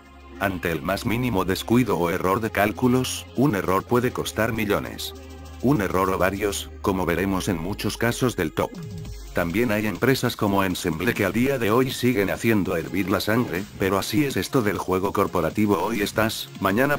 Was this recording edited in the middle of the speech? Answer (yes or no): no